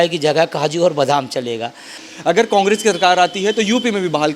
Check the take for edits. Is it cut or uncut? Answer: cut